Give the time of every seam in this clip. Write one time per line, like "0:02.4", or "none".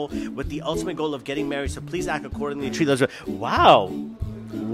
none